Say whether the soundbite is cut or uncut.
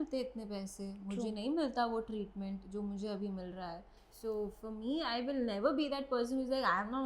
uncut